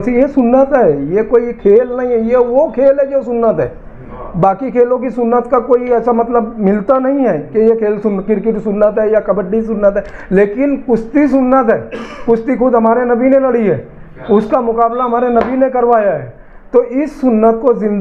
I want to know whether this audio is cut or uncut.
uncut